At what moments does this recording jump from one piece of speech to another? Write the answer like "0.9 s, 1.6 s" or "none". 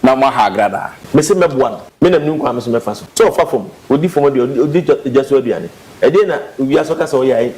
0.9 s, 1.8 s, 3.0 s